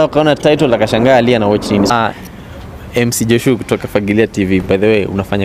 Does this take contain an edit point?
yes; 1 cut; at 1.9 s

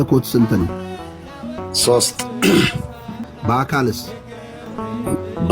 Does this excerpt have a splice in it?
yes; 2 cuts; at 3.3 s, 4.7 s

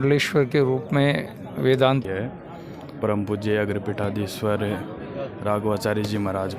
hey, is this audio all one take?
no; 1 cut; at 2.0 s

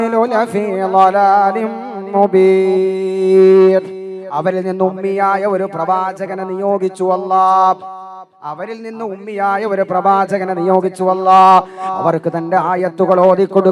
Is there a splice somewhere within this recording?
no; 0 cuts

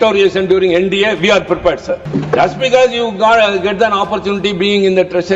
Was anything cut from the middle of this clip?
yes; 1 cut; at 2.1 s

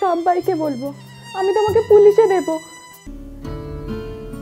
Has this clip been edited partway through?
yes; 1 cut; at 3.1 s

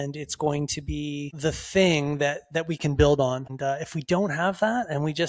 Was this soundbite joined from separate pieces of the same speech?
yes; 2 cuts; at 1.3 s, 3.5 s

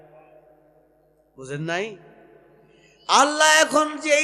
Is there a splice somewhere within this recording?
no; 0 cuts

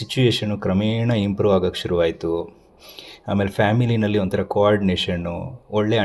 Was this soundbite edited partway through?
no; 0 cuts

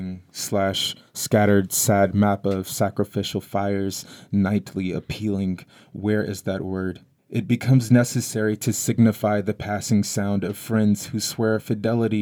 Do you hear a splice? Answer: yes; 1 cut; at 7.1 s

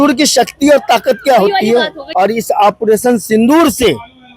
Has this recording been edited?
yes; 1 cut; at 2.0 s

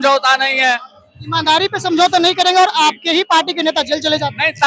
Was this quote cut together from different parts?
no; 0 cuts

